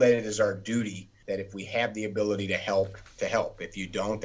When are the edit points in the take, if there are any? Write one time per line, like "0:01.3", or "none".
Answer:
0:01.1
0:03.0